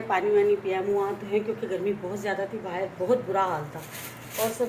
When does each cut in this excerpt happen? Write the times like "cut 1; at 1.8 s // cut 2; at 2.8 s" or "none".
none